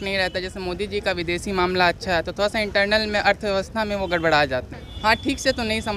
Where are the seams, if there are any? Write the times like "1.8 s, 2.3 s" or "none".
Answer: 4.8 s